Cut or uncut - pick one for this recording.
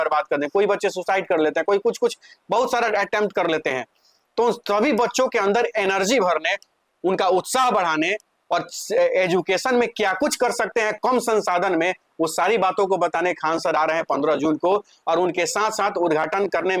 uncut